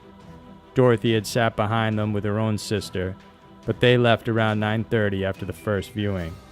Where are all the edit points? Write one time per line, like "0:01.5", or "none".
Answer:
0:01.7